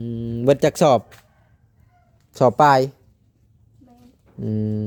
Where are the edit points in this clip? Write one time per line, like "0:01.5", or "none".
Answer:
none